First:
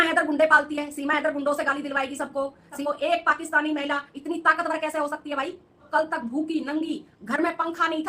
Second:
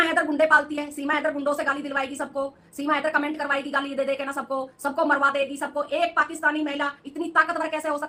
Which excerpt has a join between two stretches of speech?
first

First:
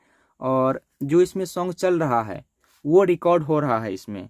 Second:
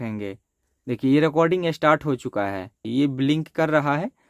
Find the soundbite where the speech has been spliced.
second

